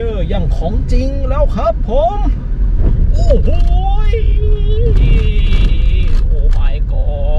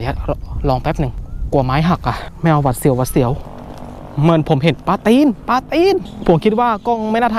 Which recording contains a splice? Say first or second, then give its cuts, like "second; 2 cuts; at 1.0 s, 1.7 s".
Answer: second; 4 cuts; at 1.2 s, 2.3 s, 3.4 s, 6.1 s